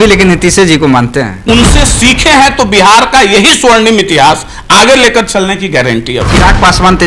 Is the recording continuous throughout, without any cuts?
no; 1 cut; at 1.4 s

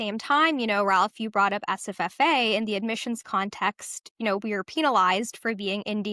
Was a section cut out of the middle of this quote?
no; 0 cuts

